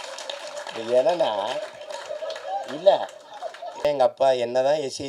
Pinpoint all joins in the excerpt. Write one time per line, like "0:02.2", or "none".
0:03.9